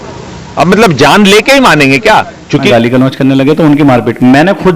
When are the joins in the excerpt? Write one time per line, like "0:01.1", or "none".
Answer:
0:02.7